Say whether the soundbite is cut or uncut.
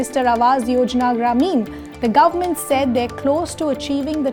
uncut